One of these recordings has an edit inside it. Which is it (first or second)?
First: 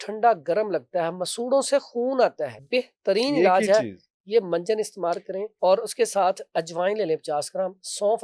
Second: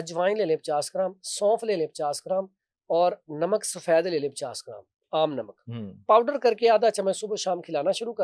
first